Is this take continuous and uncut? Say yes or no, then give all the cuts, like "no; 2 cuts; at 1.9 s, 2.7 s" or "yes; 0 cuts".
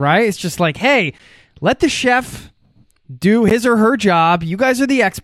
yes; 0 cuts